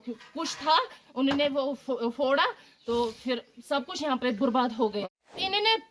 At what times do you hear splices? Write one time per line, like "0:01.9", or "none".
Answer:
0:05.0